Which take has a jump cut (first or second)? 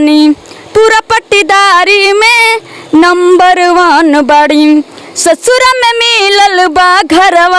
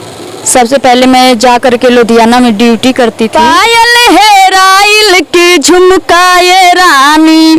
second